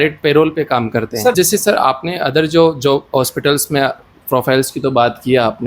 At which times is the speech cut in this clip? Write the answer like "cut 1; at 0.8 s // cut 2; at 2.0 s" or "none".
cut 1; at 1.3 s